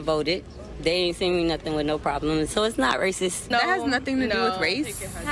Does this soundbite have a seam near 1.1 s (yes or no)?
no